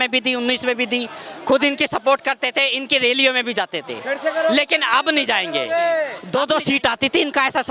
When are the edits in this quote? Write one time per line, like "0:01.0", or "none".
0:06.2